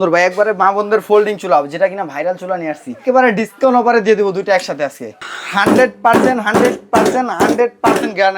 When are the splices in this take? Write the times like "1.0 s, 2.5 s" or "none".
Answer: 3.0 s, 5.2 s